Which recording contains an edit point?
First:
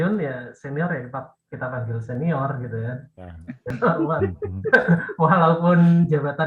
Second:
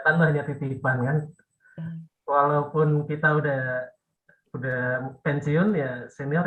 first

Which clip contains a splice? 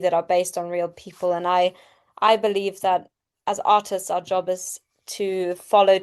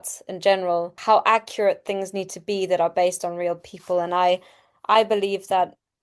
second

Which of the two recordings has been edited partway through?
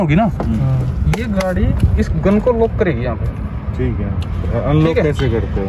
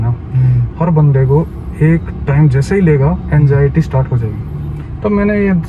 second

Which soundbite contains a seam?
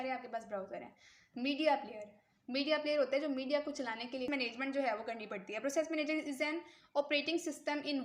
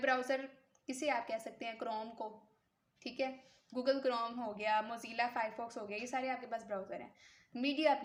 first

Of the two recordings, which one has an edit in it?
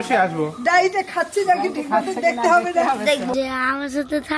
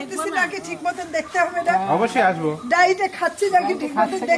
first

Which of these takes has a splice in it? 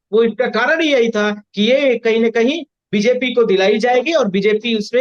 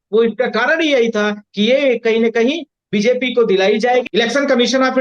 second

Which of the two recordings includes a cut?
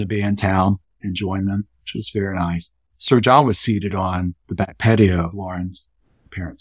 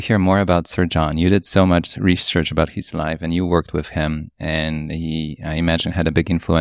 first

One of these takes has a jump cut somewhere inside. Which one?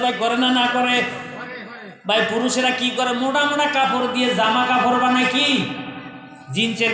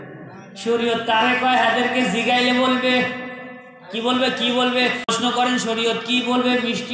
second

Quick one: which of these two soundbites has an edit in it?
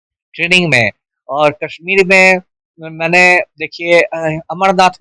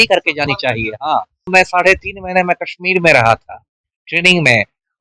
second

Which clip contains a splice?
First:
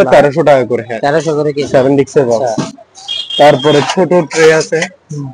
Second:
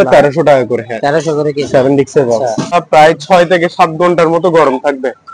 second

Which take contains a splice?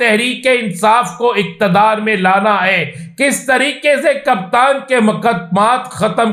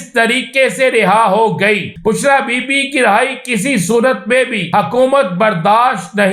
second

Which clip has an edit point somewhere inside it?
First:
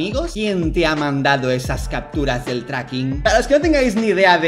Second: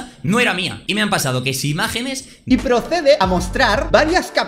second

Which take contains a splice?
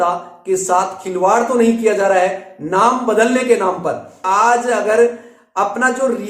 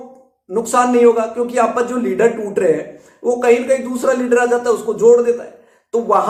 first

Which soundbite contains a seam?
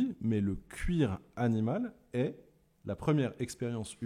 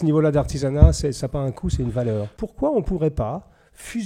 second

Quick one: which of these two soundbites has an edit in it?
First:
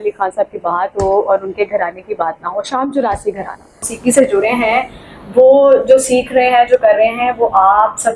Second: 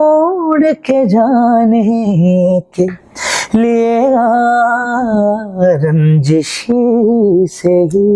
first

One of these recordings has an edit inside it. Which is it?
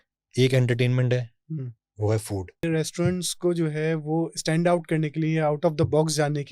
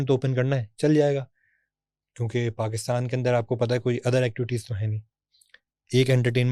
first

